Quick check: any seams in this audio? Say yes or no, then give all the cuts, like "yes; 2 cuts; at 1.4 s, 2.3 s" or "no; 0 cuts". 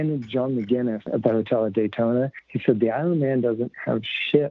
yes; 2 cuts; at 1.1 s, 2.4 s